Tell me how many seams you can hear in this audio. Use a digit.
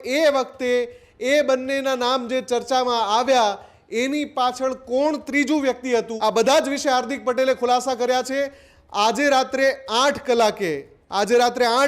1